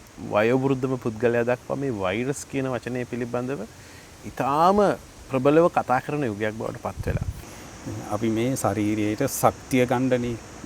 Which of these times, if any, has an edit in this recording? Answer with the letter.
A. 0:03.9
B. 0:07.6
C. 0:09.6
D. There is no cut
B